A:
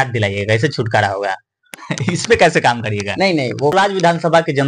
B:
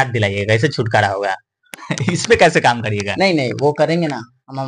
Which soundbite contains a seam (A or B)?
A